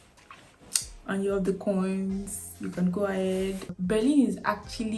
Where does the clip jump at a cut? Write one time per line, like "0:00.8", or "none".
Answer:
0:03.7